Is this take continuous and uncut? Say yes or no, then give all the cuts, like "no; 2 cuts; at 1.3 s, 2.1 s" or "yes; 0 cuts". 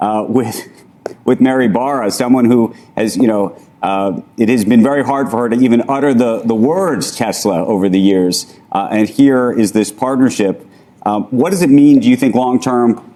yes; 0 cuts